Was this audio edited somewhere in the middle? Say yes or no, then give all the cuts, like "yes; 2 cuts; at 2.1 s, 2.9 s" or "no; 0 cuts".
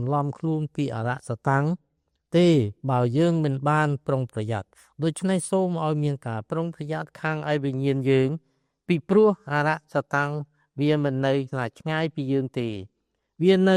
no; 0 cuts